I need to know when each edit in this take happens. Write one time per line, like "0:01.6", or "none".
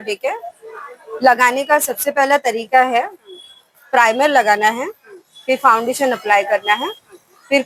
none